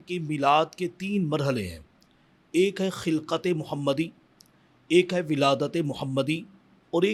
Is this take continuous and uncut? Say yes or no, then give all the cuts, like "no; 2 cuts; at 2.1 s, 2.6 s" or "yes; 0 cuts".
yes; 0 cuts